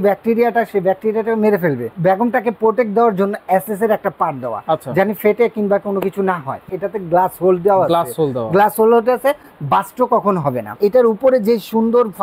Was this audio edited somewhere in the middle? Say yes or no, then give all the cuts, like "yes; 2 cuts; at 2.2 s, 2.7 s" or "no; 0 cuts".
yes; 3 cuts; at 1.9 s, 6.7 s, 10.8 s